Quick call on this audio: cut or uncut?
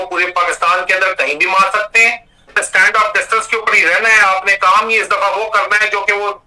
cut